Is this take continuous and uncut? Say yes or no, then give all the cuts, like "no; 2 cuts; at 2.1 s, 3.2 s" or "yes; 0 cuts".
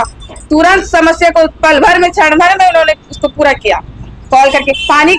yes; 0 cuts